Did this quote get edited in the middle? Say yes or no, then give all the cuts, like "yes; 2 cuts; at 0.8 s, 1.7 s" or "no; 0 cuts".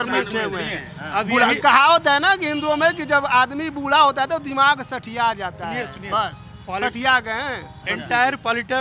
no; 0 cuts